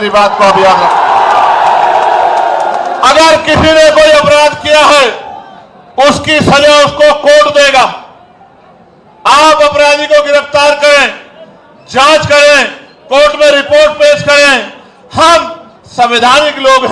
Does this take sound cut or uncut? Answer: uncut